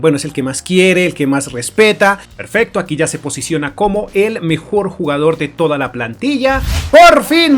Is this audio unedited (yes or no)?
no